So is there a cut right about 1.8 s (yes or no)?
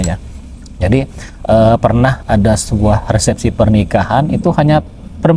no